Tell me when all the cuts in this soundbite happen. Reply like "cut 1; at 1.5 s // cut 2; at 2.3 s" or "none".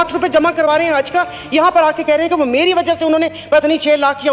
none